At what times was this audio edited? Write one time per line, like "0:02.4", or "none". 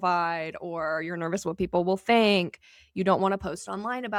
none